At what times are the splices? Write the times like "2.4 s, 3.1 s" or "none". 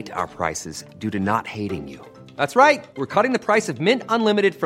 none

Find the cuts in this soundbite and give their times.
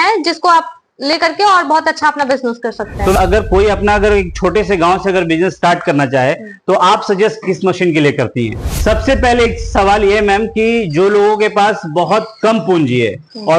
3.1 s, 8.7 s

